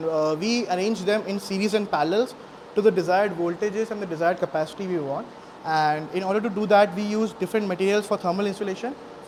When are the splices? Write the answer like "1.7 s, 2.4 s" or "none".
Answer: none